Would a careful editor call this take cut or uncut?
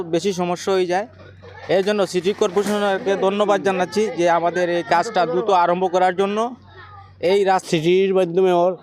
cut